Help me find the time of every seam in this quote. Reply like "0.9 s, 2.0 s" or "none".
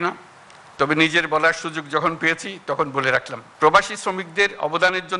3.4 s